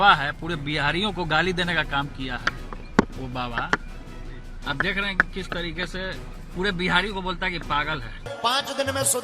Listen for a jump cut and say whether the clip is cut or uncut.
cut